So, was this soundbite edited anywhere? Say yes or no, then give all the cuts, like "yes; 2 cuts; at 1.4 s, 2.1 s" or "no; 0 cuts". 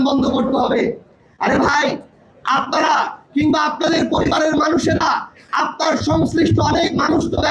no; 0 cuts